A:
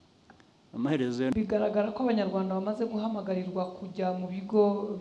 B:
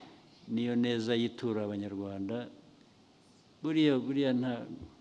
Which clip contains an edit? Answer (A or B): A